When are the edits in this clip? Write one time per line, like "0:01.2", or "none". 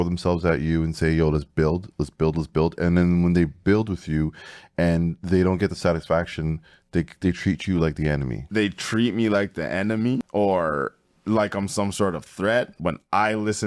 0:08.4
0:10.3
0:12.8